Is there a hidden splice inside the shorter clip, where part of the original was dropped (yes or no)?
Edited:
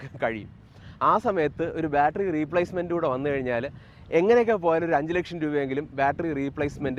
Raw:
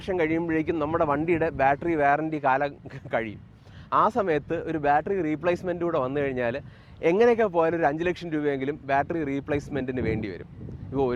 no